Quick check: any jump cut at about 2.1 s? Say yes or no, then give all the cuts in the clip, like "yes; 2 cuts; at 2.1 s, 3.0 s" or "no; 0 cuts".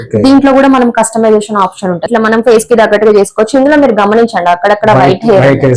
yes; 1 cut; at 2.1 s